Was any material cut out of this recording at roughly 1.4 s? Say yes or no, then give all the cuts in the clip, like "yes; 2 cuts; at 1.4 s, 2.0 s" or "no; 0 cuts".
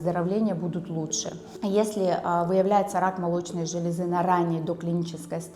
no; 0 cuts